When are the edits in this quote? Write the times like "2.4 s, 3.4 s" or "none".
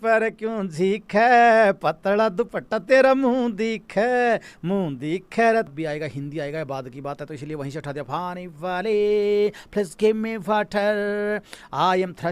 5.7 s